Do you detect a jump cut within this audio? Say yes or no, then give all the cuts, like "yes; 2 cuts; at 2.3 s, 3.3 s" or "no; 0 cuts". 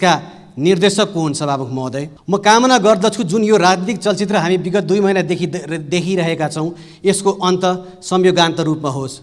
yes; 1 cut; at 2.1 s